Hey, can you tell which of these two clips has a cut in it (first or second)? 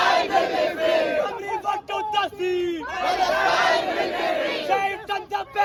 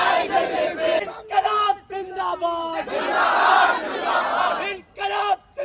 second